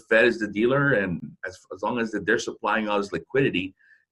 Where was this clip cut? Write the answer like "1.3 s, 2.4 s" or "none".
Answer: 1.2 s